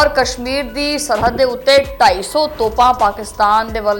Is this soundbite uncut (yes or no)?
yes